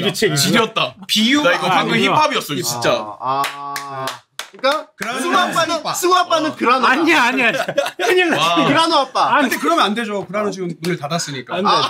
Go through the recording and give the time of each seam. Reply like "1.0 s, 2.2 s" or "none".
none